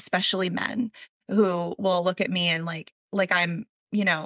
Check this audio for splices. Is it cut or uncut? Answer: uncut